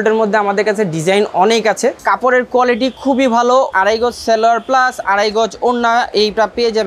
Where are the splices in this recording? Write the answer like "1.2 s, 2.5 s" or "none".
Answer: 2.0 s, 3.7 s